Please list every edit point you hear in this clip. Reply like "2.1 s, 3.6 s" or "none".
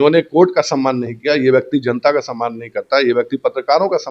none